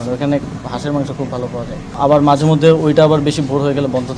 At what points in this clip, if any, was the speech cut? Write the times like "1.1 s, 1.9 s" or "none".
1.9 s